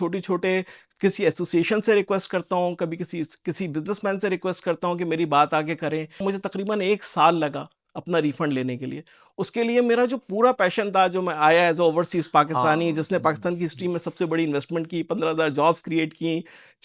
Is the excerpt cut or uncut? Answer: cut